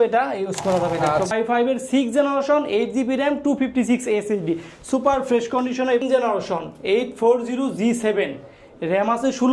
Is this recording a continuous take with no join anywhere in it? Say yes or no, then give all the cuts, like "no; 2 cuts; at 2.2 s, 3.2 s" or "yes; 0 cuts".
no; 2 cuts; at 1.3 s, 6.0 s